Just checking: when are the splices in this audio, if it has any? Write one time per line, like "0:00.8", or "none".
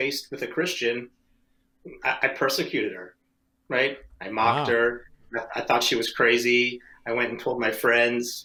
none

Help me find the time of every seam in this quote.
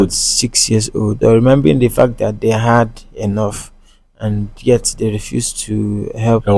0:01.2

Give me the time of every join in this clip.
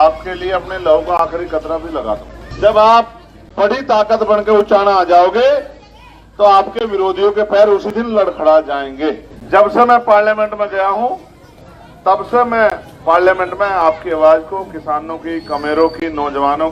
0:02.4
0:09.3

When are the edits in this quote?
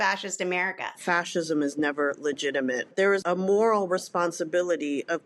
0:01.0
0:03.1

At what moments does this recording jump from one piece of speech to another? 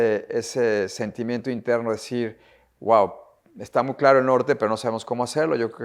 none

